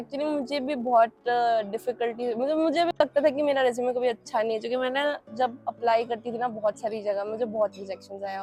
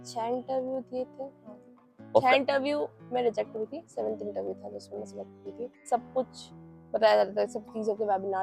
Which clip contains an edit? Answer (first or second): second